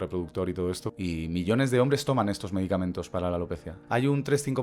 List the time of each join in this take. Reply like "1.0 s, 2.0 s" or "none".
0.9 s, 3.7 s